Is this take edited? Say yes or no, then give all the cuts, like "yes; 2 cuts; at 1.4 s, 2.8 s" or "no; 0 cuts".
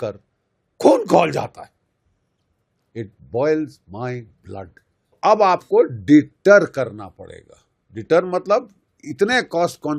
yes; 1 cut; at 5.1 s